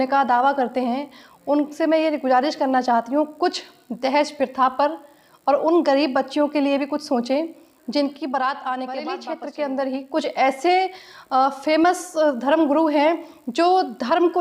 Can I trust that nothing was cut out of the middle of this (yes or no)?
no